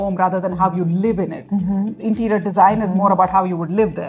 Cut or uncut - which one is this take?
uncut